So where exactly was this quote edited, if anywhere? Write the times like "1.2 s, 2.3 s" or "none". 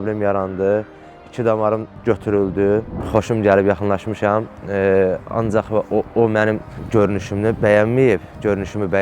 2.9 s